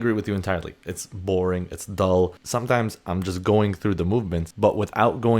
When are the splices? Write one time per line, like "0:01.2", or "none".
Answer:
0:02.4